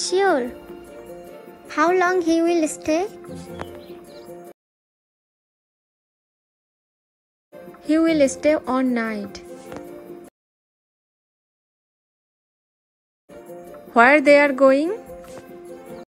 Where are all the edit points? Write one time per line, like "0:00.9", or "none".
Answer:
none